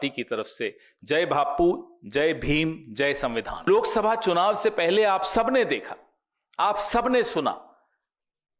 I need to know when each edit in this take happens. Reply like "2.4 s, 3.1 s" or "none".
3.7 s